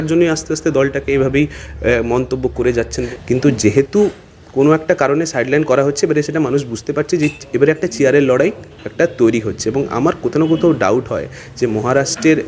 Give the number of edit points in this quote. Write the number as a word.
one